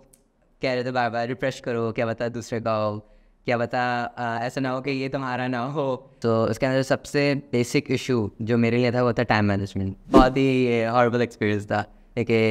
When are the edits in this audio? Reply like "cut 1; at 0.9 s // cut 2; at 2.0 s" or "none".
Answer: cut 1; at 6.1 s // cut 2; at 10.1 s